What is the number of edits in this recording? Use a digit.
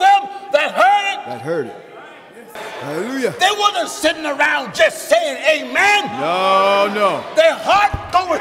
1